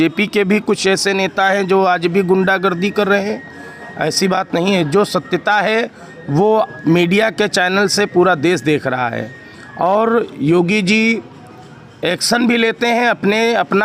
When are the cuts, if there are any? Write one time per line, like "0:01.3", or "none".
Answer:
none

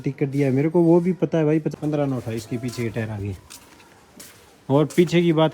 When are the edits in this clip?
0:01.7

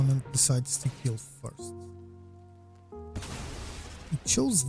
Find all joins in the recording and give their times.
0:01.5
0:03.1

